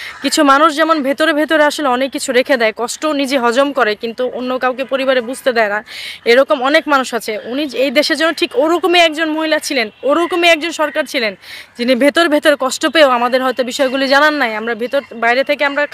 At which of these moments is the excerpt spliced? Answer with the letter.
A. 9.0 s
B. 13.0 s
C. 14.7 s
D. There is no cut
D